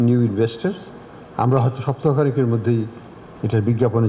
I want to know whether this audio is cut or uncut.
uncut